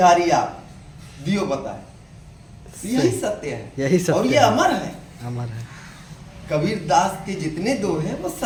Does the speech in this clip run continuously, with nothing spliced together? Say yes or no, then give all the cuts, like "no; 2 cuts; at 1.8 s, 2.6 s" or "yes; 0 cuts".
yes; 0 cuts